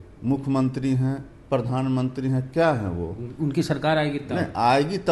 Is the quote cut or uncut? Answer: uncut